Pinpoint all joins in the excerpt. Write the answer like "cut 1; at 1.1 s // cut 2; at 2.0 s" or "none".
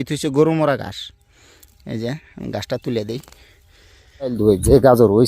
cut 1; at 4.4 s

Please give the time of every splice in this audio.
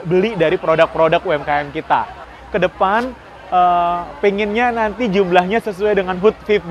cut 1; at 2.3 s

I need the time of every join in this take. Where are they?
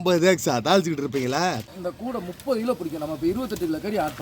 cut 1; at 1.7 s

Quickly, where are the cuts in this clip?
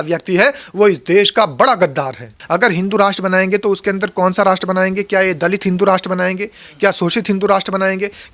cut 1; at 2.3 s

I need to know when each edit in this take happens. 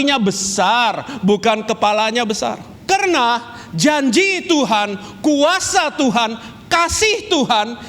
cut 1; at 2.7 s

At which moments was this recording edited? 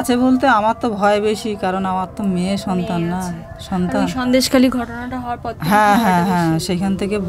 none

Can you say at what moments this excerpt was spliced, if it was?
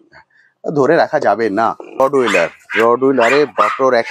cut 1; at 2.0 s

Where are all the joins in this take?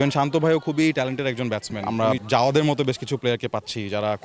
cut 1; at 1.9 s

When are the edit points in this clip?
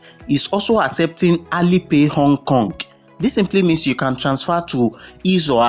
none

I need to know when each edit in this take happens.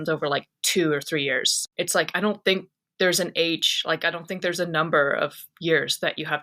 cut 1; at 1.5 s

